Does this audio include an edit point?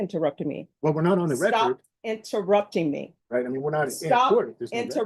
yes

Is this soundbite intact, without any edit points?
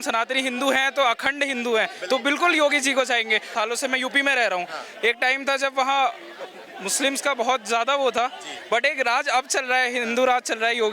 no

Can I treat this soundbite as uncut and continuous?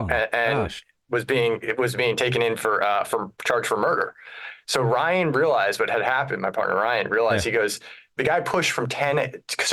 yes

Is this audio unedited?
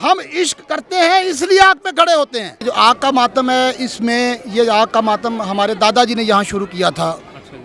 no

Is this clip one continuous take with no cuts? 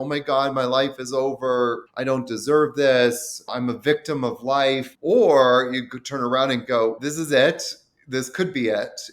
no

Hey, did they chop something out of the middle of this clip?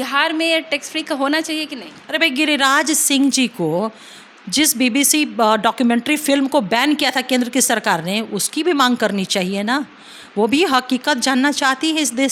no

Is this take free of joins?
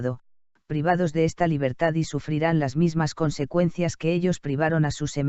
yes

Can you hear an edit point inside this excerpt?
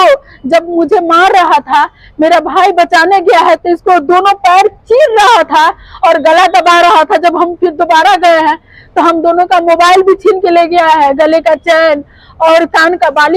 no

